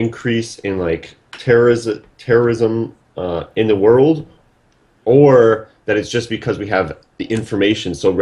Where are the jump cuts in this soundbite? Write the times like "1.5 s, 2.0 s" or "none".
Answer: 4.9 s